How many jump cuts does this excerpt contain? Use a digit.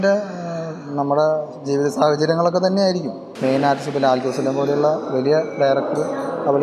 1